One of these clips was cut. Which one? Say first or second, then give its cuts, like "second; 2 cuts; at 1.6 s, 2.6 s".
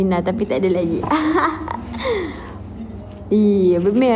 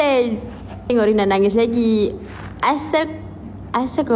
second; 1 cut; at 0.9 s